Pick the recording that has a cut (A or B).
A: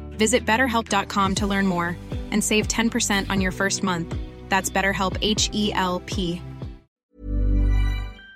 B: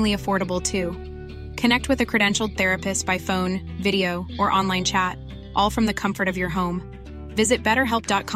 A